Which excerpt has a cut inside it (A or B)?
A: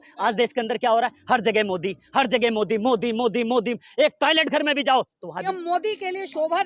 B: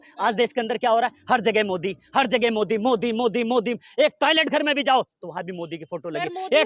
A